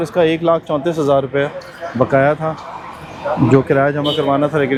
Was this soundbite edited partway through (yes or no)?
no